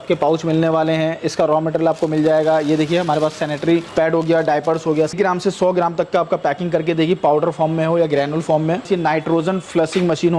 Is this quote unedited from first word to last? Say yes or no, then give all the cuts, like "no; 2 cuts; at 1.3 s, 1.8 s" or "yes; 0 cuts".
no; 3 cuts; at 3.9 s, 5.1 s, 8.9 s